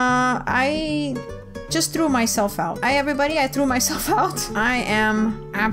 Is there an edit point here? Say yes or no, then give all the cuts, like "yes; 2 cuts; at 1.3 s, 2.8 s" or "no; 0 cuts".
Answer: yes; 1 cut; at 4.5 s